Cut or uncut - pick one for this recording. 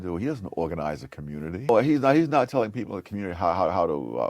cut